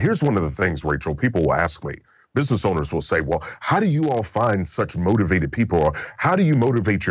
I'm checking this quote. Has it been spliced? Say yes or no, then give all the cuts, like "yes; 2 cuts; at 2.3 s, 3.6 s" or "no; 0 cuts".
no; 0 cuts